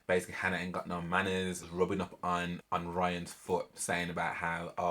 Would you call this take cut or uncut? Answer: cut